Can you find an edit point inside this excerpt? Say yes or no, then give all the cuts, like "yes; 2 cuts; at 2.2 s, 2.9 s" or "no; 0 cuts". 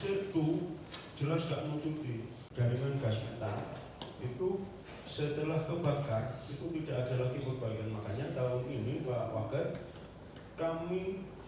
yes; 1 cut; at 2.4 s